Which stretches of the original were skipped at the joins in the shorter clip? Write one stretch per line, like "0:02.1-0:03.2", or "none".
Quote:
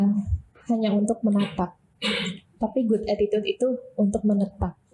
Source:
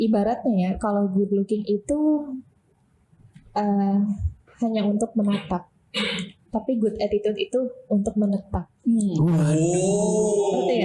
none